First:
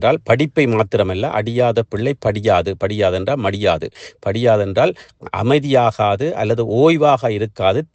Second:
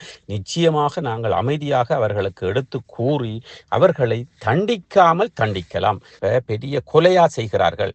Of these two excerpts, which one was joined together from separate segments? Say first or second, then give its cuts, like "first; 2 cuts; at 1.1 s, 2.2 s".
second; 1 cut; at 6.1 s